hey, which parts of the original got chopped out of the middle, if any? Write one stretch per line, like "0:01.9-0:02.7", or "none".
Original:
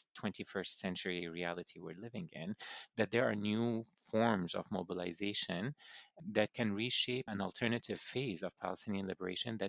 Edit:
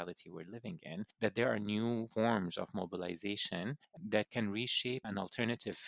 0:02.6-0:02.9
0:03.8-0:04.1
0:05.9-0:06.1